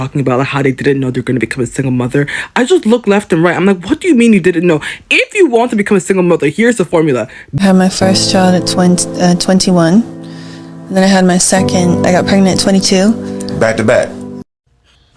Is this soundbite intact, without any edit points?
no; 2 cuts; at 7.4 s, 14.2 s

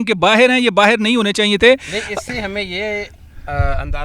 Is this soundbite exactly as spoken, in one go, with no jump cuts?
yes; 0 cuts

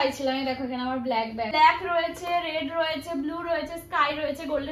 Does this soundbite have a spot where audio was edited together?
yes; 1 cut; at 1.5 s

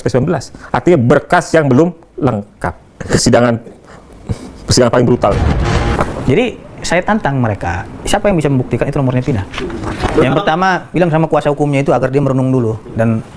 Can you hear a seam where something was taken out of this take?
yes; 3 cuts; at 3.0 s, 6.0 s, 10.1 s

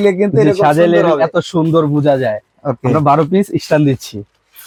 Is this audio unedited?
yes; 0 cuts

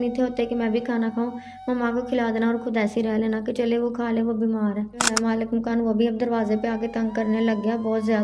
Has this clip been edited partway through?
yes; 1 cut; at 5.1 s

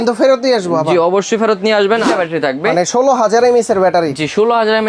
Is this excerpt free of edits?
no; 1 cut; at 2.1 s

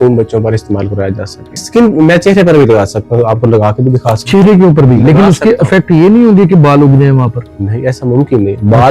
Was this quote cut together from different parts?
yes; 1 cut; at 1.6 s

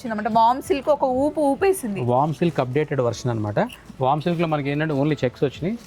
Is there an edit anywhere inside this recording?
no; 0 cuts

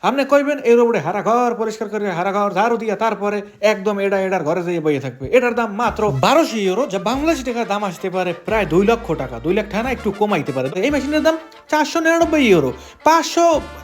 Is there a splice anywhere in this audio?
yes; 1 cut; at 10.7 s

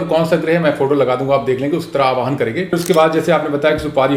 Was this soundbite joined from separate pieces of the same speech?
yes; 1 cut; at 2.7 s

